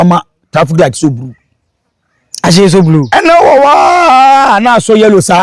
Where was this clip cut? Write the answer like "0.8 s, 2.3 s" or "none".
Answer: none